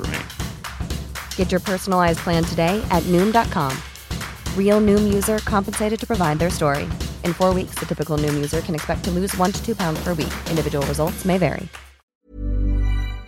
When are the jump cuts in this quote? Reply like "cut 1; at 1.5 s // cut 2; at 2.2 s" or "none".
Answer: cut 1; at 12.2 s

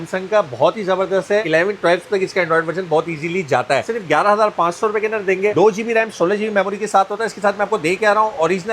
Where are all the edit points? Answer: cut 1; at 1.5 s // cut 2; at 3.9 s

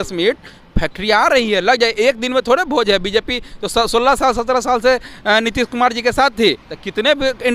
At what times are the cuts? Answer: none

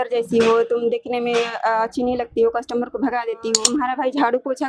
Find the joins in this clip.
cut 1; at 3.5 s

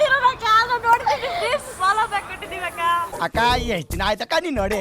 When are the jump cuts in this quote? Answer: cut 1; at 3.1 s

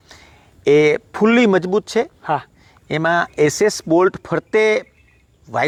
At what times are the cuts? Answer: none

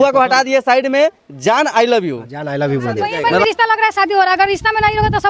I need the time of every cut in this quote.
cut 1; at 3.0 s

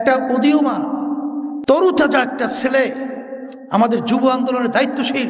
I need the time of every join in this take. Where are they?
none

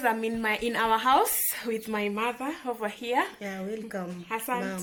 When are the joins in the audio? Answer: none

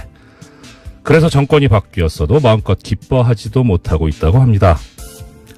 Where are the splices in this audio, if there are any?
none

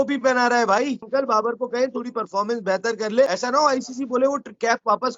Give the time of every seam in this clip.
cut 1; at 1.1 s // cut 2; at 3.3 s

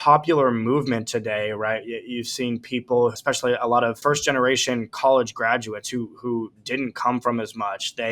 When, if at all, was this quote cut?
cut 1; at 3.2 s // cut 2; at 4.0 s

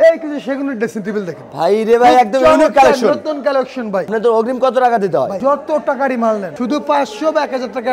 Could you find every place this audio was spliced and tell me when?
cut 1; at 4.1 s // cut 2; at 5.4 s // cut 3; at 6.5 s

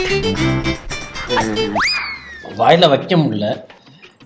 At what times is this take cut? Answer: none

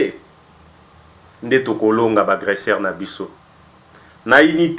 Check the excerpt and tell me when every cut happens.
none

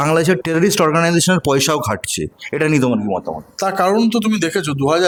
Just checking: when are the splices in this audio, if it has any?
none

